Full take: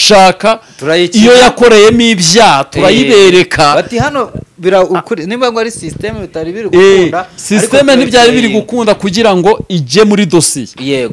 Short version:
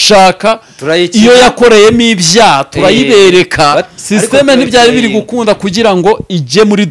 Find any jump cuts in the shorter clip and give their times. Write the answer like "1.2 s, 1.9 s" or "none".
3.9 s